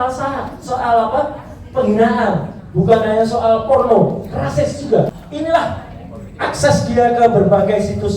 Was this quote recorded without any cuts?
no; 1 cut; at 5.0 s

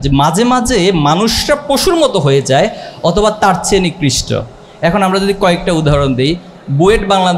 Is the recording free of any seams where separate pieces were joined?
yes; 0 cuts

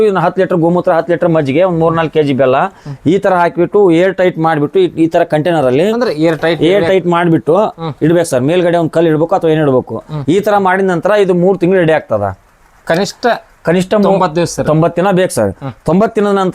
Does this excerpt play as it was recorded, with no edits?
no; 1 cut; at 10.1 s

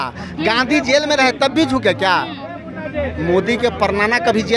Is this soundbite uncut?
yes; 0 cuts

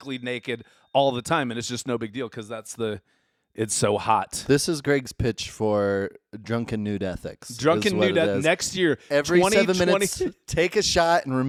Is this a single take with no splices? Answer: yes; 0 cuts

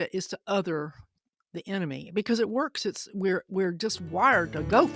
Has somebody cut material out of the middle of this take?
no; 0 cuts

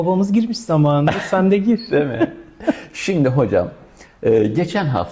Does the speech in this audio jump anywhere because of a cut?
no; 0 cuts

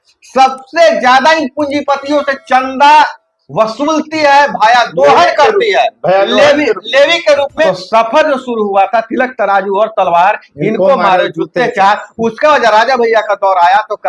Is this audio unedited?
no; 1 cut; at 7.7 s

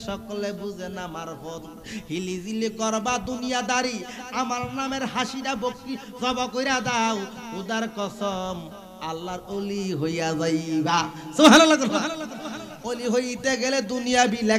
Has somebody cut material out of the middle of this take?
no; 0 cuts

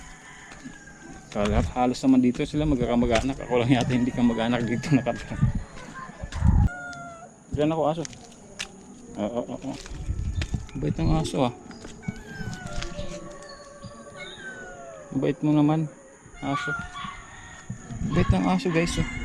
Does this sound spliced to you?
yes; 1 cut; at 6.8 s

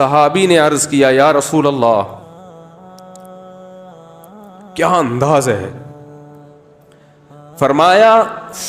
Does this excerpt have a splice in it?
yes; 4 cuts; at 2.2 s, 4.7 s, 5.8 s, 7.6 s

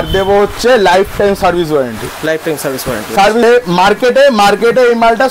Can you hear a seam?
yes; 1 cut; at 3.4 s

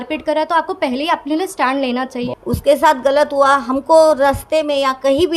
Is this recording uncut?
no; 1 cut; at 2.2 s

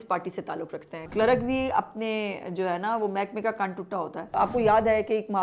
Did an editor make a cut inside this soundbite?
yes; 2 cuts; at 1.1 s, 4.3 s

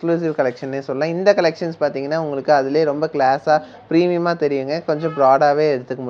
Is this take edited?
no; 0 cuts

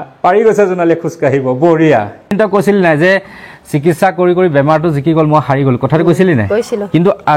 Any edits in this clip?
yes; 1 cut; at 2.3 s

